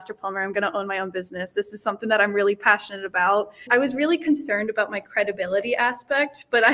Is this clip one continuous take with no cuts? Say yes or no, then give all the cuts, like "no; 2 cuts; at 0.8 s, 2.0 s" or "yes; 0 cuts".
no; 1 cut; at 3.7 s